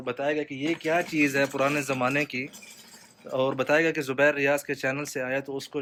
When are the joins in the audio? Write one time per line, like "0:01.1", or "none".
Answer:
none